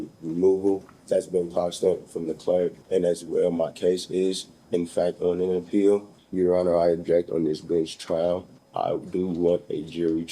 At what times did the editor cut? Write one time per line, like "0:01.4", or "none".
0:00.9
0:02.8
0:06.2
0:08.6